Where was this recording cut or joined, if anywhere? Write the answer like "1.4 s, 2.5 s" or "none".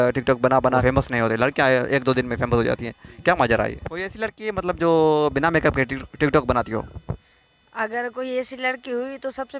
0.8 s, 4.0 s